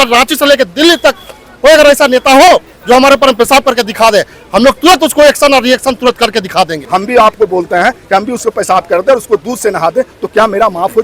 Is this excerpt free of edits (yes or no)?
no